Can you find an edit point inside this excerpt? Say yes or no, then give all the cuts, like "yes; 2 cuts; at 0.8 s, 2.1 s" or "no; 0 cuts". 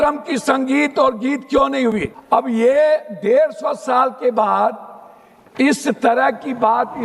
yes; 1 cut; at 2.1 s